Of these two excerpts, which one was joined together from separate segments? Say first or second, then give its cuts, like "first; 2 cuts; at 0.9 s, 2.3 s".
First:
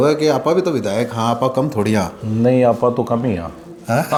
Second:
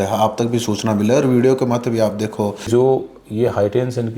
second; 1 cut; at 2.7 s